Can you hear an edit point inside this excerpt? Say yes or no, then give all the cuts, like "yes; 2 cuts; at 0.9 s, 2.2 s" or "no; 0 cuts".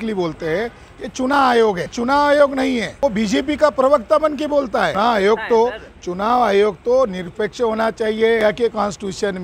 yes; 4 cuts; at 1.9 s, 2.9 s, 4.9 s, 8.4 s